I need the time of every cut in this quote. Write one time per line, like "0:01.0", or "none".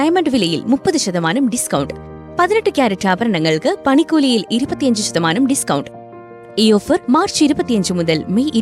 none